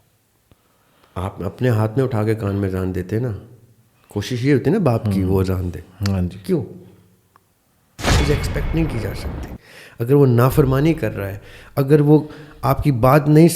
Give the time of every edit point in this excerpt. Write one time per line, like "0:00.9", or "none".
0:08.1